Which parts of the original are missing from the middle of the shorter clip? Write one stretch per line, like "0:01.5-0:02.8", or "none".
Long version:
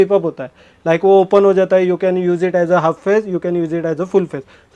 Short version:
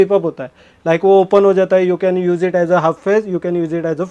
none